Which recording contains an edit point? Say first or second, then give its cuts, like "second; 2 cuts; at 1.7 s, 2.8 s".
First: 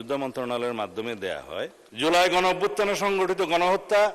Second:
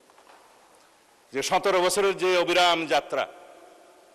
first; 1 cut; at 1.8 s